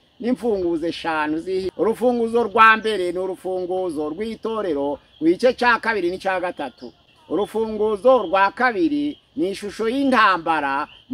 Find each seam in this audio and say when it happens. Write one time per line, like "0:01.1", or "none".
0:01.7